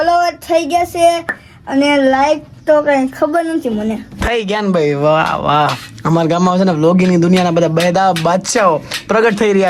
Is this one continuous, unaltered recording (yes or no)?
yes